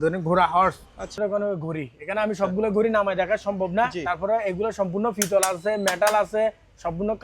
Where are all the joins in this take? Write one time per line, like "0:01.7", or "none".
0:01.2